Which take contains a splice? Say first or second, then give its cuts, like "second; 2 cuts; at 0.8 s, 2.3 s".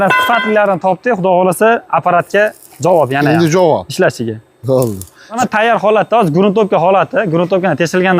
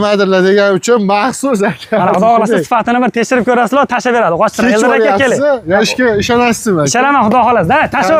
first; 1 cut; at 5.4 s